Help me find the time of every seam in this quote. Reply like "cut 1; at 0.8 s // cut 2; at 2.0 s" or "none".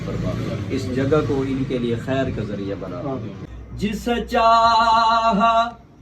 cut 1; at 3.3 s